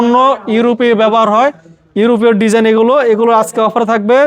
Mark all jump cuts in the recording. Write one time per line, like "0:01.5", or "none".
none